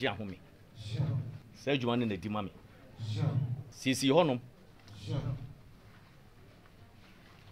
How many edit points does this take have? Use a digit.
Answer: 2